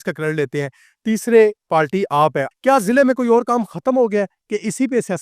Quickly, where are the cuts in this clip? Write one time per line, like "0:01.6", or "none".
0:02.5